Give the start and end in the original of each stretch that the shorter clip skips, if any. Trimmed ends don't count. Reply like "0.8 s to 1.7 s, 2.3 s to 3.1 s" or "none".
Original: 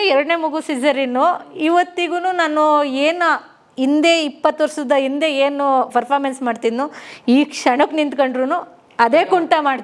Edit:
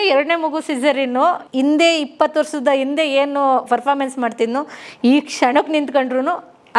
1.4 s to 3.7 s